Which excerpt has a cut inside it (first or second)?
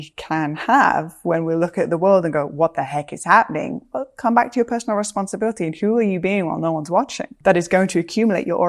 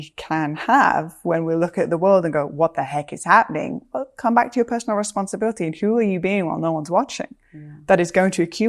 first